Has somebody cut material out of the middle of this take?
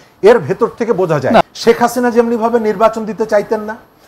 yes; 1 cut; at 1.4 s

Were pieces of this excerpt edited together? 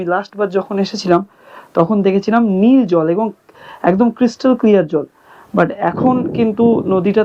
no; 0 cuts

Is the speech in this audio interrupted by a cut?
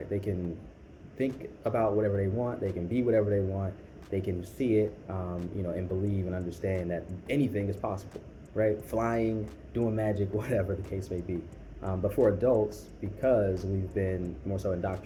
no; 0 cuts

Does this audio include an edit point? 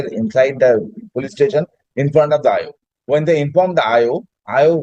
no; 0 cuts

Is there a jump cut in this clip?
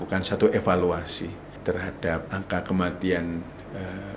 yes; 2 cuts; at 1.5 s, 2.3 s

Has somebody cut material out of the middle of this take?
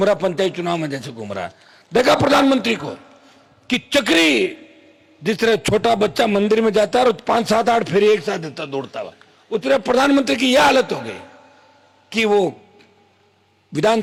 no; 0 cuts

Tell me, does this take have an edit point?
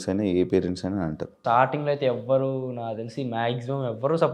yes; 1 cut; at 1.4 s

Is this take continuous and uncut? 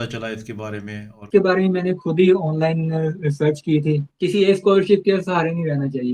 no; 2 cuts; at 1.2 s, 4.1 s

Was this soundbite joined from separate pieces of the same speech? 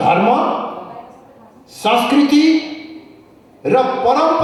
no; 0 cuts

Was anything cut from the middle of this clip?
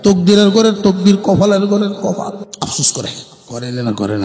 yes; 2 cuts; at 2.4 s, 3.3 s

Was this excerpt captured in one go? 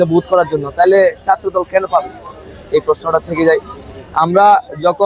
yes; 0 cuts

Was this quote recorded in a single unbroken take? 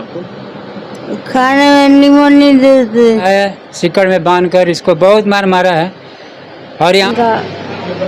no; 2 cuts; at 3.2 s, 7.1 s

